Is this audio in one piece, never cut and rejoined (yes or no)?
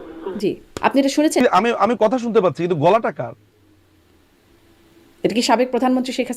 no